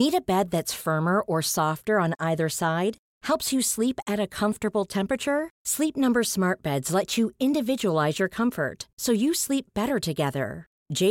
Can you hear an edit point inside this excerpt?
no; 0 cuts

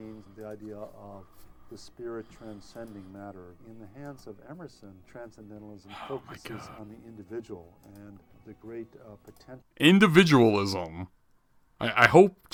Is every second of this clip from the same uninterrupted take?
yes; 0 cuts

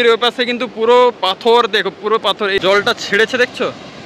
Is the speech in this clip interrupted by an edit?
yes; 1 cut; at 2.6 s

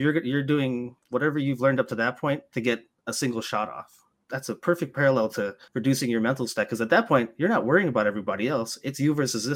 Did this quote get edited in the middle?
yes; 4 cuts; at 1.0 s, 2.5 s, 4.2 s, 5.6 s

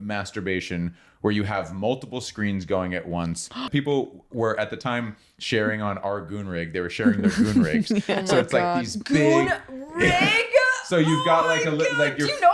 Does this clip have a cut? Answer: yes; 1 cut; at 3.6 s

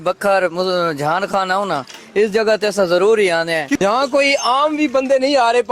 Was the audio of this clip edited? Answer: yes; 1 cut; at 3.8 s

